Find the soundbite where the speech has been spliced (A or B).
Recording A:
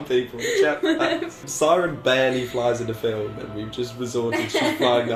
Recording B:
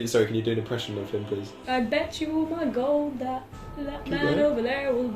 B